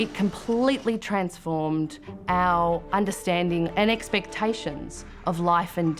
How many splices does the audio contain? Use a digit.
1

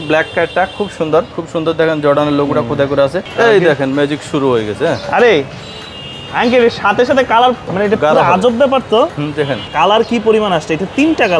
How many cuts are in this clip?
4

